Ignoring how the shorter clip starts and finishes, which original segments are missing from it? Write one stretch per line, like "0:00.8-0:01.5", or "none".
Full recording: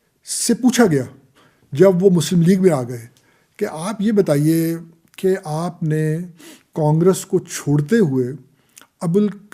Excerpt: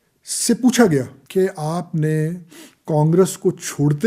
0:01.2-0:05.1